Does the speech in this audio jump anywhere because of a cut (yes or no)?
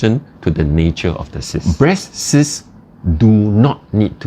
yes